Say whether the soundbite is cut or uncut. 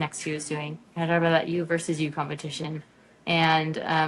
uncut